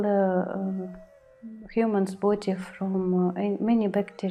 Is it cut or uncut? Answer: uncut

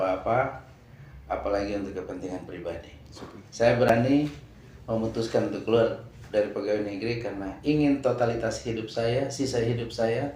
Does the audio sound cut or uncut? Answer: cut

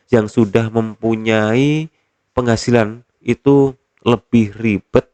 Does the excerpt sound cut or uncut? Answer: uncut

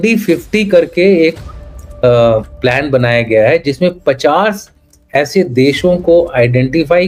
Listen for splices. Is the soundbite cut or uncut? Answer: uncut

